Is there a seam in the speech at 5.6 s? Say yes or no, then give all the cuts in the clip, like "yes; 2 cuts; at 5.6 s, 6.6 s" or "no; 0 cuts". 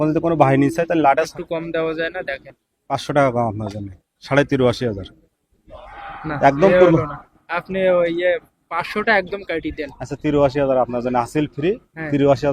no; 1 cut; at 1.3 s